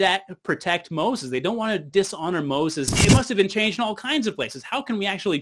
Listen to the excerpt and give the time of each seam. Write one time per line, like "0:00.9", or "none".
0:03.0